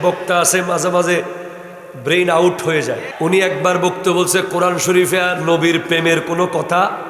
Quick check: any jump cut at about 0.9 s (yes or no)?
no